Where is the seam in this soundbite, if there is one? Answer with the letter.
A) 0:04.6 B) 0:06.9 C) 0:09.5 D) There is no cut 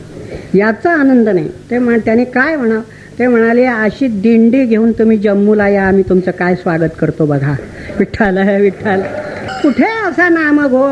C